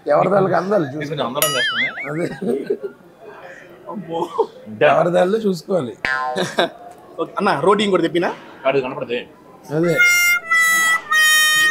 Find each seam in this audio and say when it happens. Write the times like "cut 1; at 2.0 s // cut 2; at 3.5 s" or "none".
none